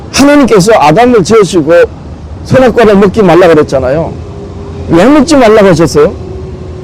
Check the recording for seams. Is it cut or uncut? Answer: uncut